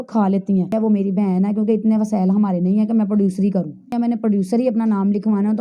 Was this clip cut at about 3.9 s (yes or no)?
yes